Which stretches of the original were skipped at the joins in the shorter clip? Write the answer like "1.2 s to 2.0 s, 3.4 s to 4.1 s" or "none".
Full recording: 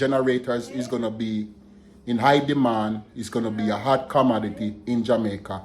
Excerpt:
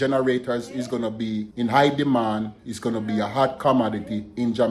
1.5 s to 2.0 s